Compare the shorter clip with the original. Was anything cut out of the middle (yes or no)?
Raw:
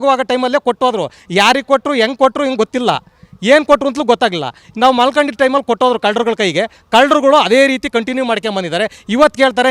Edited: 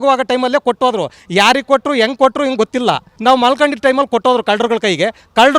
yes